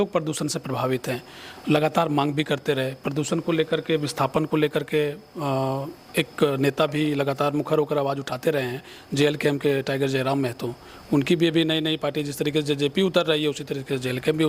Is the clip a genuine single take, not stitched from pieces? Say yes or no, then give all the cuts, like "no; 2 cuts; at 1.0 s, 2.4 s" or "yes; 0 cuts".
yes; 0 cuts